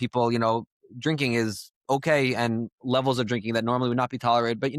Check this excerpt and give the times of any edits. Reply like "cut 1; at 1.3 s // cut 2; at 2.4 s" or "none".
none